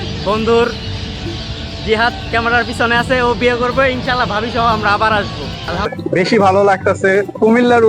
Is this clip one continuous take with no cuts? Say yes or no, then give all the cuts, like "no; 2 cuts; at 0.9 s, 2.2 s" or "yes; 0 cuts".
no; 1 cut; at 5.9 s